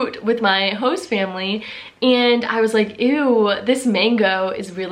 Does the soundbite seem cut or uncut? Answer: uncut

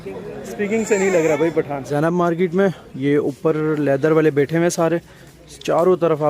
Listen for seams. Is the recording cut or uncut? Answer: cut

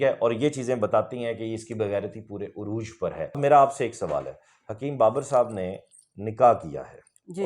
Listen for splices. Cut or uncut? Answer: cut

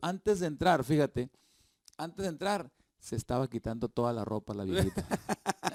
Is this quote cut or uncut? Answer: uncut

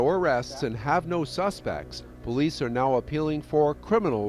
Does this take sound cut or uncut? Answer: uncut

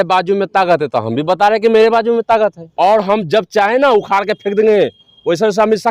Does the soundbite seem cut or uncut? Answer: cut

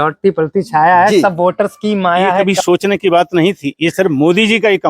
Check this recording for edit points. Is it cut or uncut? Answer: cut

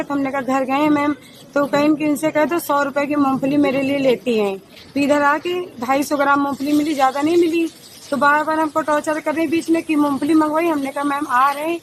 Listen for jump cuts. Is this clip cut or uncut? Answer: uncut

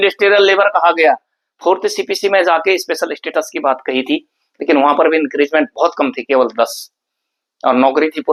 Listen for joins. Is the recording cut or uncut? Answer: uncut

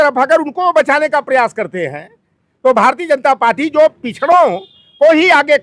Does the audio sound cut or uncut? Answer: uncut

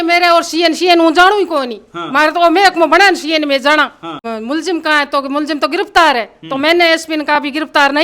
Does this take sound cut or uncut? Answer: cut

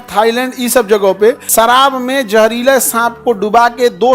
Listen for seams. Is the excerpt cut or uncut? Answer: cut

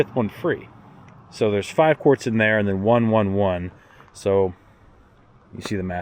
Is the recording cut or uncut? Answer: uncut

